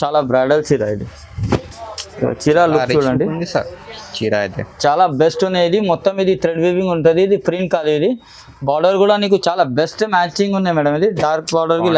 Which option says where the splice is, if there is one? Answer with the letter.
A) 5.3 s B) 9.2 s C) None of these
C